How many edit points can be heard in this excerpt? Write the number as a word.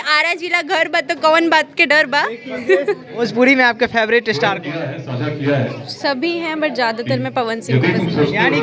one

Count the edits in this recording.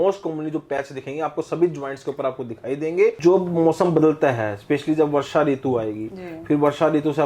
one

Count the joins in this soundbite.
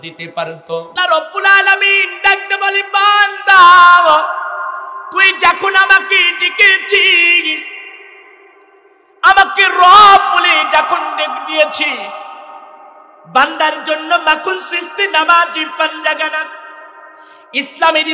one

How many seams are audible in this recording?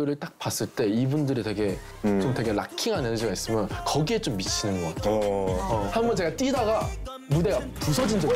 one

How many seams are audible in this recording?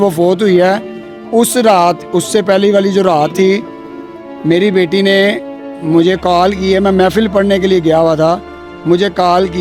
zero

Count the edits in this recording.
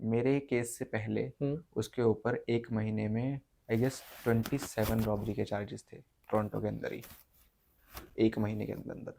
zero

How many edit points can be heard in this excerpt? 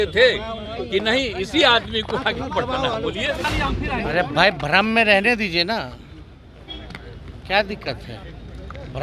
one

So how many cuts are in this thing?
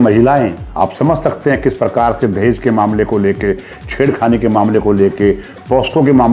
zero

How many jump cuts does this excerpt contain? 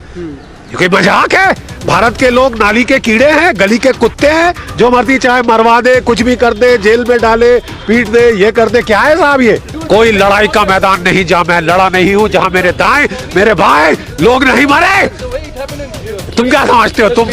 one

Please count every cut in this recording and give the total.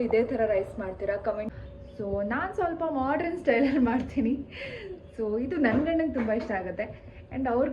one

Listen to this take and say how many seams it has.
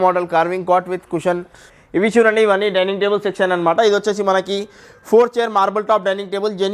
one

